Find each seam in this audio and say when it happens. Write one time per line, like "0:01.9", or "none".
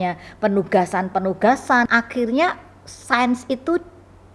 0:01.9